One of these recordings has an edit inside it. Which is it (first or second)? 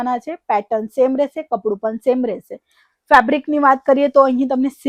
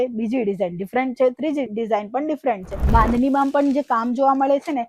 second